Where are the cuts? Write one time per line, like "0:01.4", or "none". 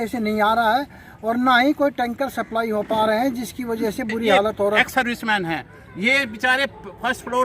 0:04.8